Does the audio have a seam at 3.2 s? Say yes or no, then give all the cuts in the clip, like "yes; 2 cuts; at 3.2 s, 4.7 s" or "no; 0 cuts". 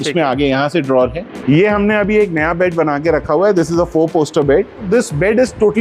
no; 2 cuts; at 1.3 s, 4.8 s